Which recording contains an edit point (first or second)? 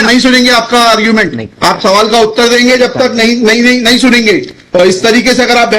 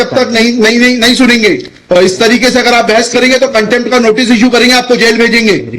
first